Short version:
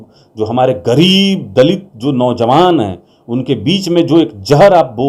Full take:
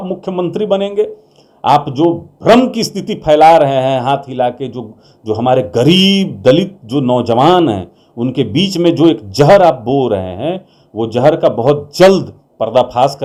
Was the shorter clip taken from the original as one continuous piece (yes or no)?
yes